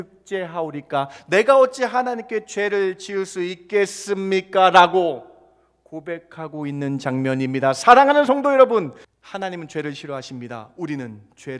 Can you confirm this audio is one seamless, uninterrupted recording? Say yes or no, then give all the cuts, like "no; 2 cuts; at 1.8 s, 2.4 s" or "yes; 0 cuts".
no; 1 cut; at 9.0 s